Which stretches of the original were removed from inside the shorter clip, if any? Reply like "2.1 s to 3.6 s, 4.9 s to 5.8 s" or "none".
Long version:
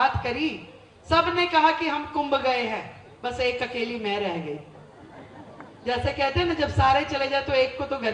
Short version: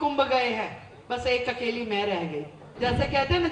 4.7 s to 5.7 s